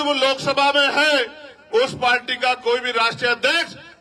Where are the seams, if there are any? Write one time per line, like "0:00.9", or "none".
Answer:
none